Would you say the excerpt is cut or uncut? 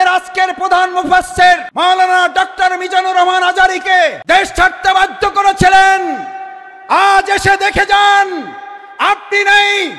cut